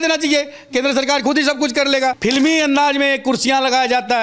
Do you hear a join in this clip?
yes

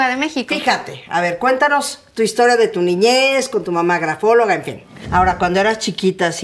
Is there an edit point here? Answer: yes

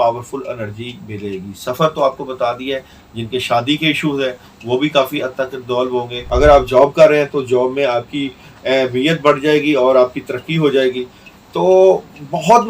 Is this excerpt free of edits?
no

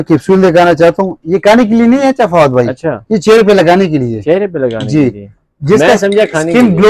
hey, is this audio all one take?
yes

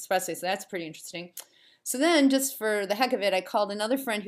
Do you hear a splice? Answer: no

